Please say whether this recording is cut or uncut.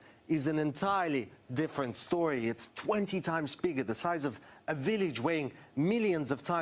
cut